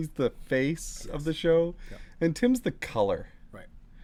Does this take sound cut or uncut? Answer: uncut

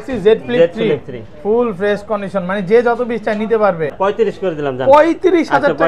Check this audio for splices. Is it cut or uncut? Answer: cut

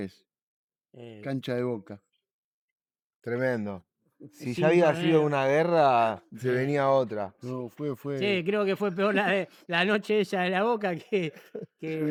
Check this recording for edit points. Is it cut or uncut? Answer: uncut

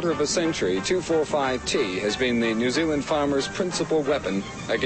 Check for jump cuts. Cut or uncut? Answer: uncut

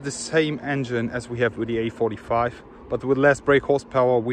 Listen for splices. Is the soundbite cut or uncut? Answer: uncut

